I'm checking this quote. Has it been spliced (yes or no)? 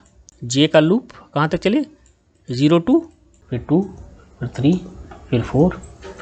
yes